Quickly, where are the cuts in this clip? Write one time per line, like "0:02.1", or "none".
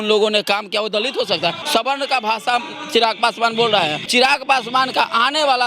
0:01.6
0:04.1